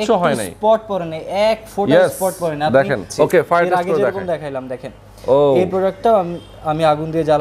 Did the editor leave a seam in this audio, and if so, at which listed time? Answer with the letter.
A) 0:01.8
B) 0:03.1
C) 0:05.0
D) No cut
B